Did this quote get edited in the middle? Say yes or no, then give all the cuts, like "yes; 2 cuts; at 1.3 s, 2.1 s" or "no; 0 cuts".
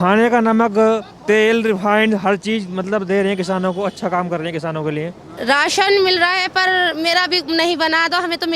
yes; 1 cut; at 5.2 s